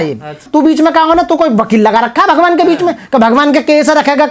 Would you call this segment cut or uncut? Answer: uncut